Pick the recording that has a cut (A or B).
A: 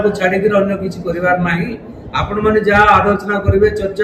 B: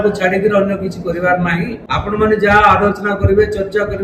B